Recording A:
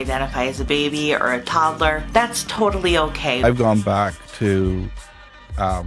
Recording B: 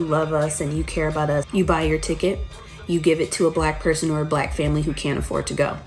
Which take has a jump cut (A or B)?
B